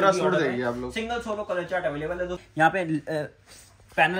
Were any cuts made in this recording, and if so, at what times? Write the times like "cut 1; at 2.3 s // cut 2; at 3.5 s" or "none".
cut 1; at 2.4 s